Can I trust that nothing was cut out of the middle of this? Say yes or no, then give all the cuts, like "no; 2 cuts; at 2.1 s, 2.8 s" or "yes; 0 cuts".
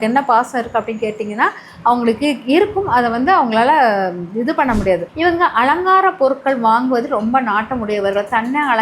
no; 1 cut; at 5.1 s